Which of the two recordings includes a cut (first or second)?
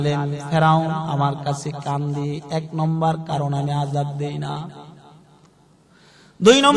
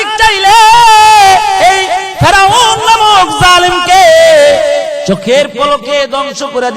second